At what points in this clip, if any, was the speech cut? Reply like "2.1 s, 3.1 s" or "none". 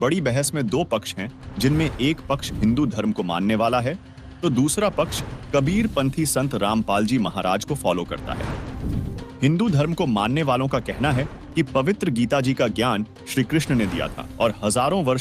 14.2 s